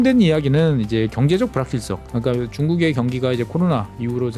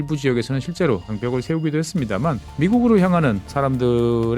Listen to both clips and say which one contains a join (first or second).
second